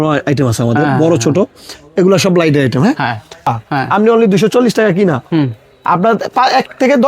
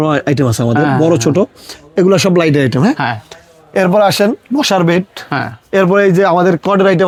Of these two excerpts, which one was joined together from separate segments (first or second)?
first